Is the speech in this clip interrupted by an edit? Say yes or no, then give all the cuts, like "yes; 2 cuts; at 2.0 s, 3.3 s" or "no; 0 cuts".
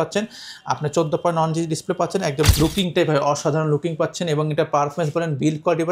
yes; 1 cut; at 2.5 s